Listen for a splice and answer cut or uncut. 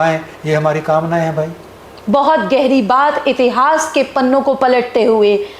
uncut